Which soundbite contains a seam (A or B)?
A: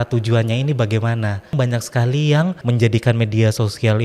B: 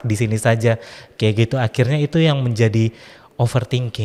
A